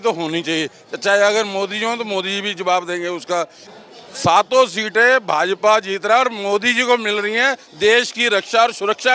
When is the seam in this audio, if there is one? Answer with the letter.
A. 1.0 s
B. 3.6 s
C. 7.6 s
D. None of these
B